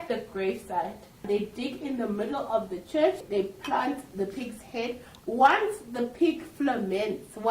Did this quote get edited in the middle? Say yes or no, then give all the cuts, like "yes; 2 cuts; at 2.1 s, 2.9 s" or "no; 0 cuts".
yes; 2 cuts; at 1.2 s, 3.2 s